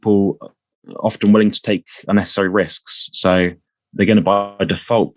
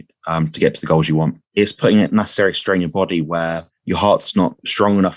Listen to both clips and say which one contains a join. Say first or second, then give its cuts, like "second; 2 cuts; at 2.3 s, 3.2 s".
second; 2 cuts; at 1.4 s, 3.7 s